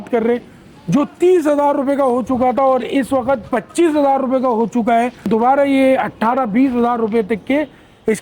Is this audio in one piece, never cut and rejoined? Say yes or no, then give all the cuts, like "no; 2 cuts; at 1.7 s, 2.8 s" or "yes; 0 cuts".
no; 1 cut; at 5.3 s